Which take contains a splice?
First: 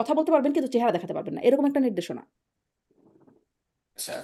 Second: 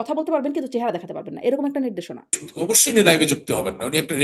second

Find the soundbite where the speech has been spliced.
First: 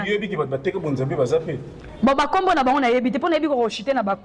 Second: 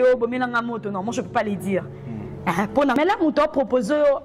second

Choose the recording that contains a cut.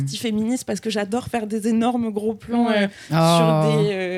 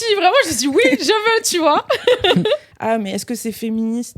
second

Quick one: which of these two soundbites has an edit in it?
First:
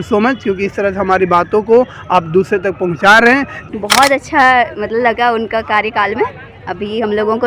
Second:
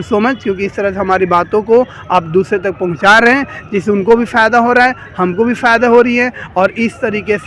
first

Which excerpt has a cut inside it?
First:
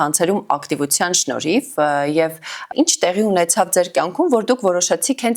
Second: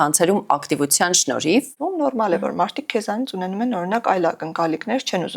second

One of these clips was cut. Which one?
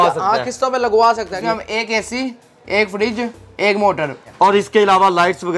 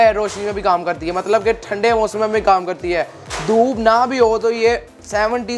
first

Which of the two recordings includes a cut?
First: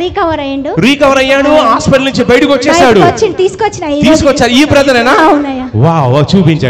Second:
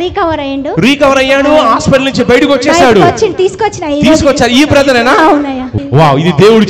second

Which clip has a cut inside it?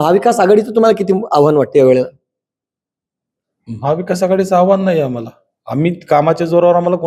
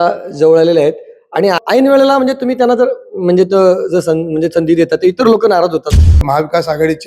second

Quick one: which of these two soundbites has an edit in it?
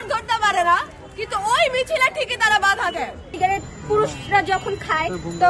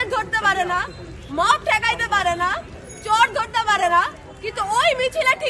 first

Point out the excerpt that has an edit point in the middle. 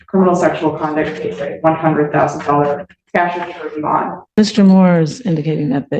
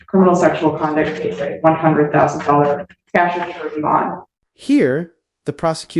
first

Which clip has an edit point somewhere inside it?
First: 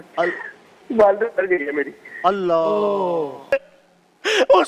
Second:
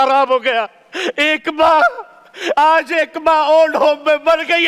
first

